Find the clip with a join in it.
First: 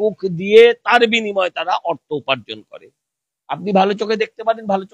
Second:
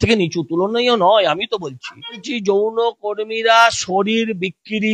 second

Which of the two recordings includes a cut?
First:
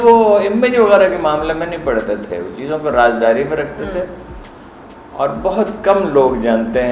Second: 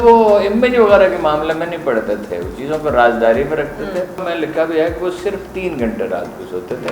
second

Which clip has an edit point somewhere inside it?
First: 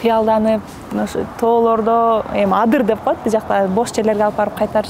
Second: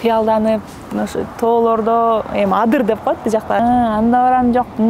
second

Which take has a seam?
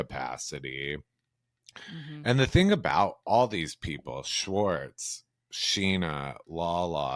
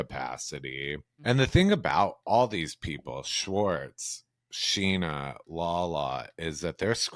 second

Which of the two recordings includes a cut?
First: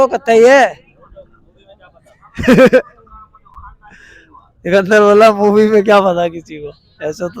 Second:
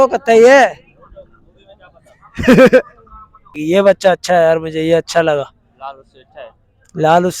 second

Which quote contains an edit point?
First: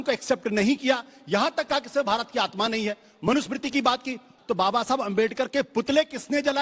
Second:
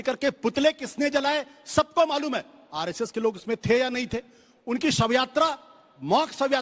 first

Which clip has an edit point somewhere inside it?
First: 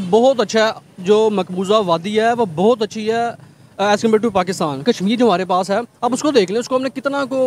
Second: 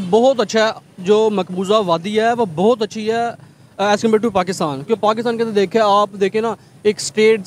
first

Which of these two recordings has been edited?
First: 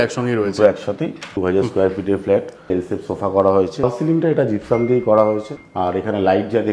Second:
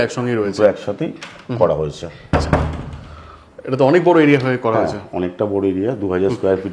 first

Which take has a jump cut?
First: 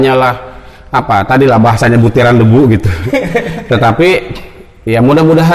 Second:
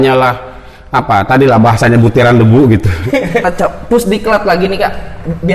second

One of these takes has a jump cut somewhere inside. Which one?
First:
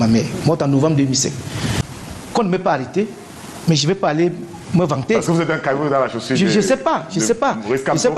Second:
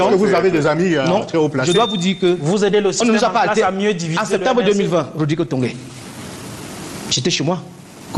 first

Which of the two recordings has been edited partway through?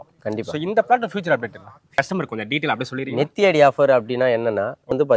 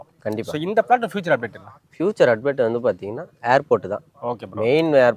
first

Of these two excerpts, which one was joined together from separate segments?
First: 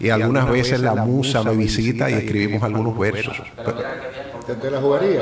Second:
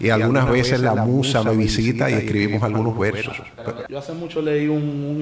second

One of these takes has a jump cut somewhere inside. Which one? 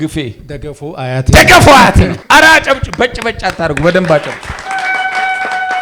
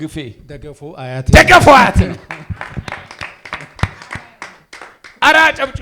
first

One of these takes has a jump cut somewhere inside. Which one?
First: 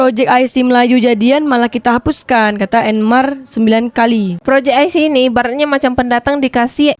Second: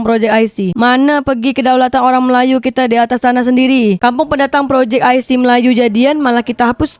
first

